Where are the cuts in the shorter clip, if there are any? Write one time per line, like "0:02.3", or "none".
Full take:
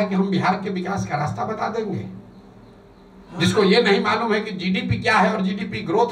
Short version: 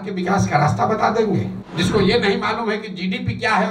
0:01.6